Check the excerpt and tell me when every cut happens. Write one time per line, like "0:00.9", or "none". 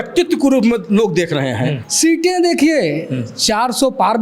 0:01.8

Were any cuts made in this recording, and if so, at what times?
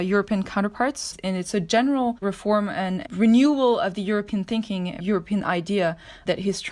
0:01.1
0:02.7
0:05.0

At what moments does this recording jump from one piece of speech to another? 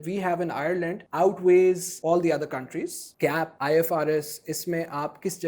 0:01.0
0:01.9
0:03.3

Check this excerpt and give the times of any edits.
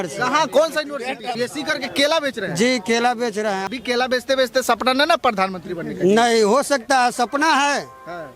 0:01.3
0:03.6

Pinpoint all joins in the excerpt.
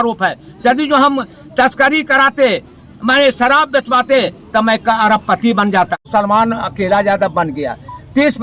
0:06.0

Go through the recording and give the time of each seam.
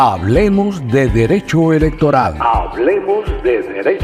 none

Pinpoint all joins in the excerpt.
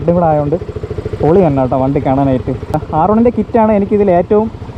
0:02.8

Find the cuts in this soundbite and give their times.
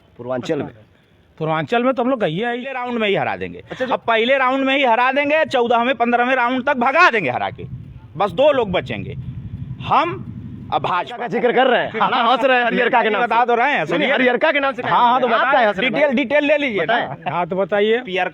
0:02.8
0:11.3

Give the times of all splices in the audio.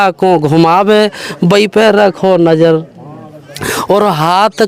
none

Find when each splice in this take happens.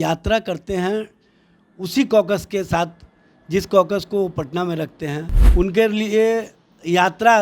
0:05.3

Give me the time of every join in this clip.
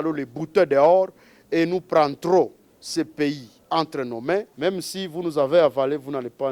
0:04.5

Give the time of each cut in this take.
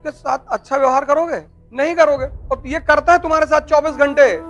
none

